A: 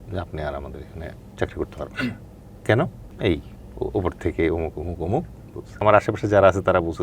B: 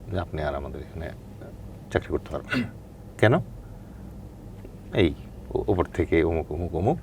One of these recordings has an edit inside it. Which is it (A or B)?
A